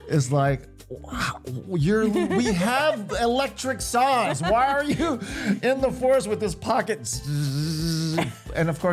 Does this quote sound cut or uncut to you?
uncut